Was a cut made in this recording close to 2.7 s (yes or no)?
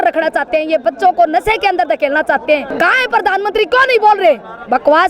yes